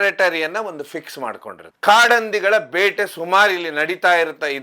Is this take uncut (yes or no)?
no